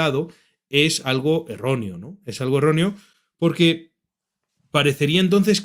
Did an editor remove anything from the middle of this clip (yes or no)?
no